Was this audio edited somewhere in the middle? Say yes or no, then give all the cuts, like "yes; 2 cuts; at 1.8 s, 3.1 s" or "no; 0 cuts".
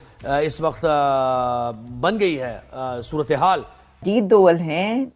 yes; 1 cut; at 4.0 s